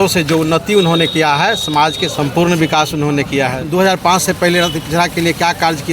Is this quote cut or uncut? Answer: cut